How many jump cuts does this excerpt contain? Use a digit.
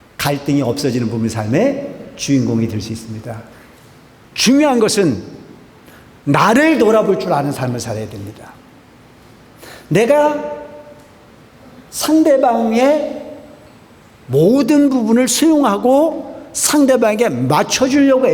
1